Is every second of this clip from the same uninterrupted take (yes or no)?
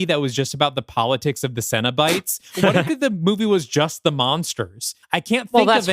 no